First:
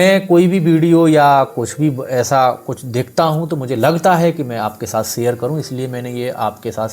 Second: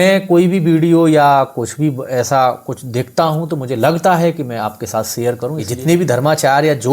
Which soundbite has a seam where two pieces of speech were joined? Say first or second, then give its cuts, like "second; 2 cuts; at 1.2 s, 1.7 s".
second; 1 cut; at 5.7 s